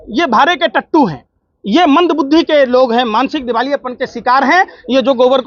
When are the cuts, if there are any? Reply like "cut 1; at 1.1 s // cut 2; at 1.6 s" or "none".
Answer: none